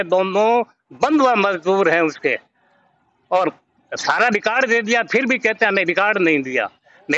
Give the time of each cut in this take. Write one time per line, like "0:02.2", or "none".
none